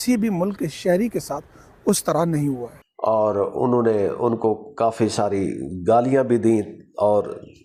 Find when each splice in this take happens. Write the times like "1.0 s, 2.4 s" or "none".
none